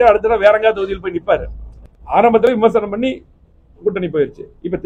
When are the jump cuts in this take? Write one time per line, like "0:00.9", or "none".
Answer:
0:01.8

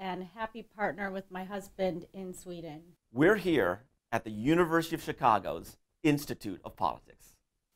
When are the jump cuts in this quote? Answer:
0:03.9

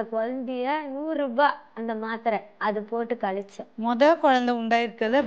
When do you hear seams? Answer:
0:03.6

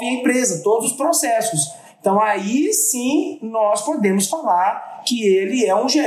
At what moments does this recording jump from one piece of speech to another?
none

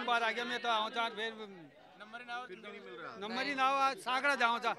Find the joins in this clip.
none

